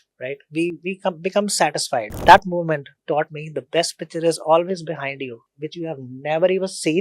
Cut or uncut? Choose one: cut